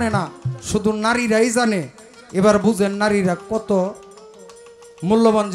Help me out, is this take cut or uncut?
uncut